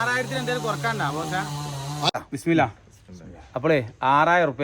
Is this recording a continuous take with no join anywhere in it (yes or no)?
no